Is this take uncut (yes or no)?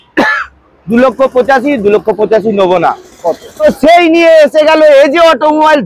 no